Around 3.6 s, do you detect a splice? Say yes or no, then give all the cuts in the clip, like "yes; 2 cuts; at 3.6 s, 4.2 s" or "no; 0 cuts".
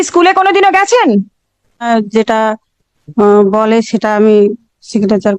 no; 1 cut; at 1.9 s